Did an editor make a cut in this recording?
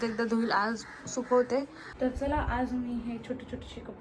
yes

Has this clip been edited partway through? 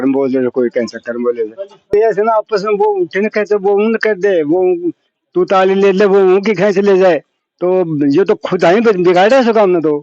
yes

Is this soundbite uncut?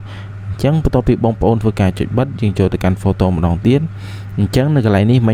yes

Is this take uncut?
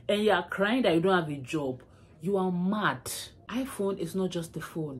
no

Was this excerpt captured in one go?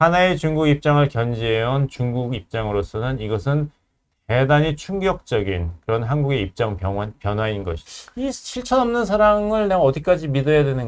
no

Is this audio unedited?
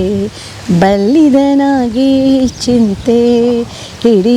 yes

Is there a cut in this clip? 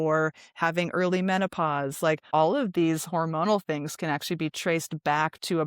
yes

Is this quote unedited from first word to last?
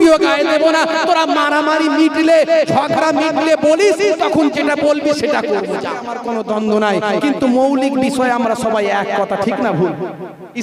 no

